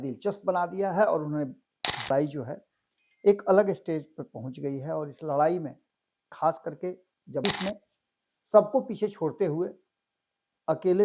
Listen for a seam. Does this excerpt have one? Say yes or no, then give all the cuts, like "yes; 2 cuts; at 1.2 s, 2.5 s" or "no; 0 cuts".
yes; 2 cuts; at 2.1 s, 7.4 s